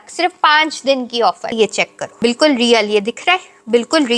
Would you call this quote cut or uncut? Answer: cut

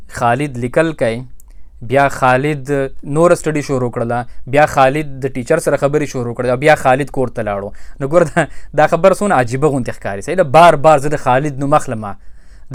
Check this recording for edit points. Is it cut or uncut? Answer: uncut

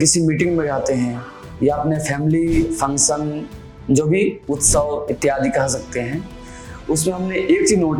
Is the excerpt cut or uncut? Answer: uncut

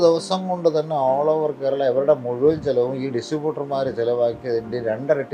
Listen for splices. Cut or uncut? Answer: uncut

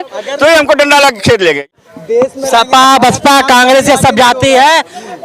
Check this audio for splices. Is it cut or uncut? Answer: cut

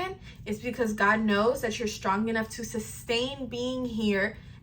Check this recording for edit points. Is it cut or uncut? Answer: uncut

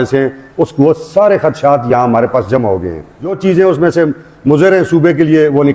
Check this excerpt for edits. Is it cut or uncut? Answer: cut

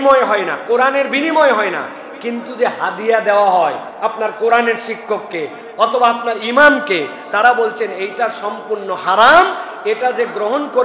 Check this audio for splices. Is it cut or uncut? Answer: uncut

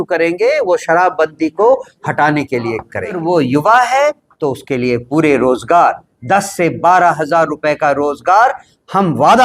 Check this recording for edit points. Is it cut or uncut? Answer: cut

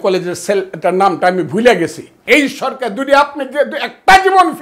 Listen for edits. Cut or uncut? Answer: cut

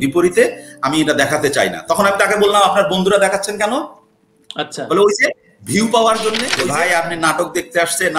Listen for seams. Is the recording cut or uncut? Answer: cut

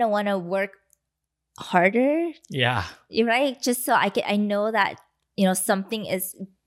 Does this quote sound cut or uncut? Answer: uncut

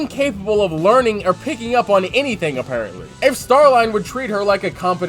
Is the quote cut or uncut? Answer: uncut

